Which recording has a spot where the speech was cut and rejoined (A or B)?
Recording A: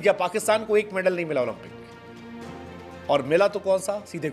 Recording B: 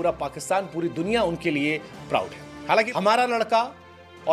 B